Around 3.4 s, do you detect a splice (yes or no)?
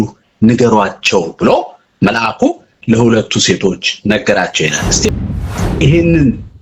no